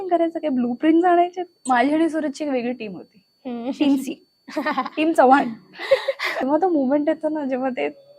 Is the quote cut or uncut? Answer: cut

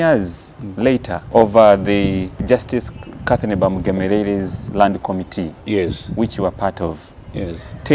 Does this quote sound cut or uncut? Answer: cut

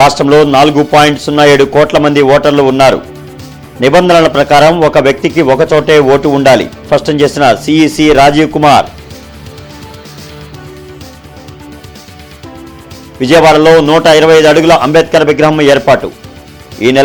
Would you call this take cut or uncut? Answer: uncut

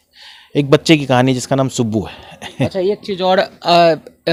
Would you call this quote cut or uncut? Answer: uncut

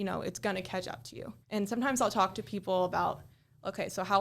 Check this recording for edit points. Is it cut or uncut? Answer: cut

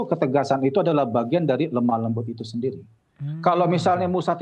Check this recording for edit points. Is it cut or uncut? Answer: uncut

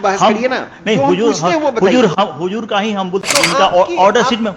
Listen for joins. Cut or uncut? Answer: cut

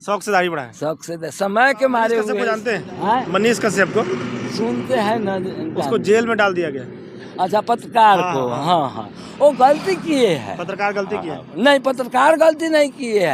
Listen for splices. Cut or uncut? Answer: cut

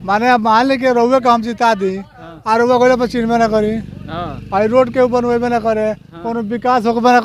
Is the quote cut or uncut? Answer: uncut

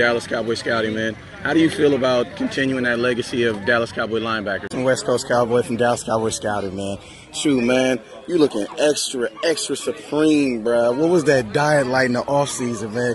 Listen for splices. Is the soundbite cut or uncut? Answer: cut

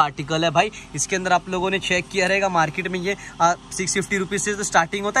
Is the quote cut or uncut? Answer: uncut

